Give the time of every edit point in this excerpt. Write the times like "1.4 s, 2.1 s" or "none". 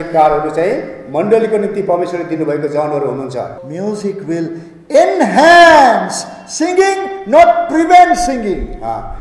3.5 s